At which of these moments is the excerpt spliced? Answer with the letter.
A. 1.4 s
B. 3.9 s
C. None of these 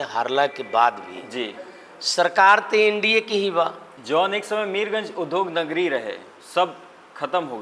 B